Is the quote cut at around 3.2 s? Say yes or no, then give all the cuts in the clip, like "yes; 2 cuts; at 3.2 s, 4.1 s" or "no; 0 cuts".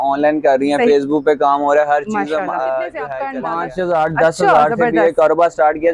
yes; 1 cut; at 3.2 s